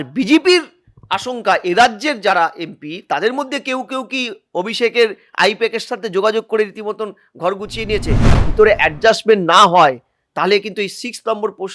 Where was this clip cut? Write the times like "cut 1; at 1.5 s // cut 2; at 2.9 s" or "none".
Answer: cut 1; at 8.3 s